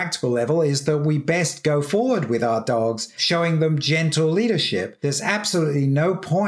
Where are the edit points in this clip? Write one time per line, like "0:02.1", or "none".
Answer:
0:03.1
0:04.9